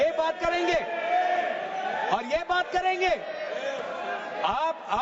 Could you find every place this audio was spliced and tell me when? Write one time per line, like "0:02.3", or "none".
none